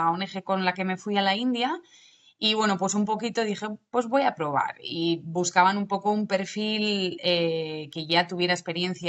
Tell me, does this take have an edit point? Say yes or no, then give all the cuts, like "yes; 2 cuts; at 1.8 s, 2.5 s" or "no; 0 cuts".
no; 0 cuts